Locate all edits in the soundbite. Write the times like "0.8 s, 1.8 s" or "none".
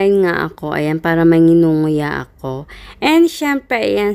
none